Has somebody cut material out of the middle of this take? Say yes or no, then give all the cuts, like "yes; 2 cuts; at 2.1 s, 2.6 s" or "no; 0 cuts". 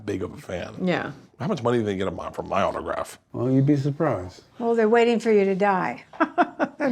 yes; 1 cut; at 3.2 s